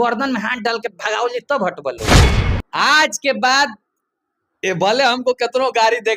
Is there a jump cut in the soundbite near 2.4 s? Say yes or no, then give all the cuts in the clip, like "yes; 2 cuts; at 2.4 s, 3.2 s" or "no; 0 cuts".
yes; 2 cuts; at 2.0 s, 2.4 s